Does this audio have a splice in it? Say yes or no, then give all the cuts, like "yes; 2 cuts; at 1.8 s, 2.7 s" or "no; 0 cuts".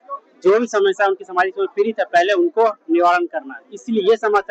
no; 0 cuts